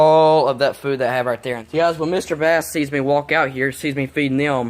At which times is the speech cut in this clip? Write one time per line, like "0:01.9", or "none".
0:01.6